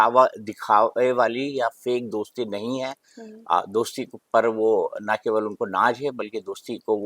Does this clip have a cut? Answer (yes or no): no